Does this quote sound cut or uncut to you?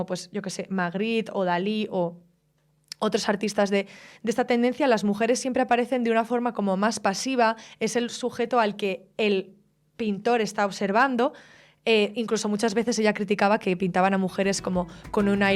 uncut